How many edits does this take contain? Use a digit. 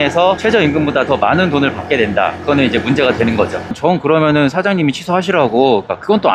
1